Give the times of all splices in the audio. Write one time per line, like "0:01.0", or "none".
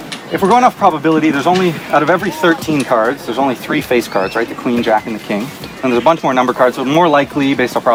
none